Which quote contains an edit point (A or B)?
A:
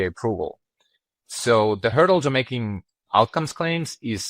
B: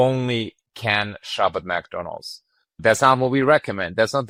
A